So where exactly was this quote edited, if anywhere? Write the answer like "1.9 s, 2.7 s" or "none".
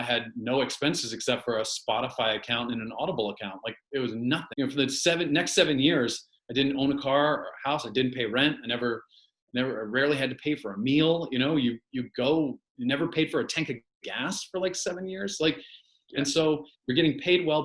4.5 s